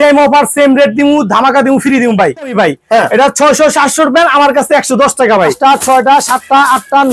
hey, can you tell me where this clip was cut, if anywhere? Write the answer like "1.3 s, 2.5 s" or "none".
2.5 s, 5.6 s